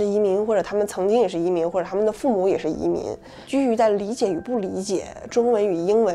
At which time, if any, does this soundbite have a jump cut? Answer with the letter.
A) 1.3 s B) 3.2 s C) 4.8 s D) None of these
D